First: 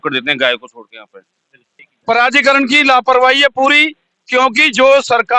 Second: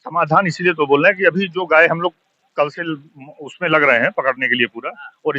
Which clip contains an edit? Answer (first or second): first